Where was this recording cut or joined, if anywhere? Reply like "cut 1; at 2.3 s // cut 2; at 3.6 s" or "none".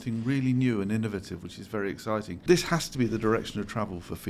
cut 1; at 2.4 s